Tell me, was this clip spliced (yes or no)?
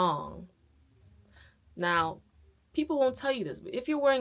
no